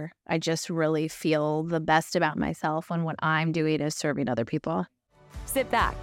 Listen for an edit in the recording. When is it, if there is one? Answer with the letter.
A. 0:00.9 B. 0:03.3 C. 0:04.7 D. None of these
C